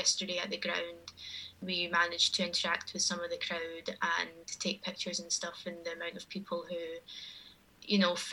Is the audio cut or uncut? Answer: cut